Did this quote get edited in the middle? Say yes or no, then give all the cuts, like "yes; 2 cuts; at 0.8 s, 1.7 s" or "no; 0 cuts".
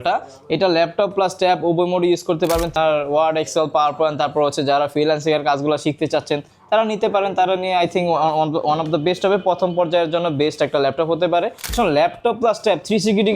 yes; 2 cuts; at 2.7 s, 11.7 s